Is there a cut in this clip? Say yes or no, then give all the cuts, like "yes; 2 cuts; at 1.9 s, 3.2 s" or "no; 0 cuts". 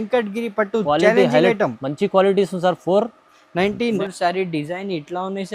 yes; 1 cut; at 4.0 s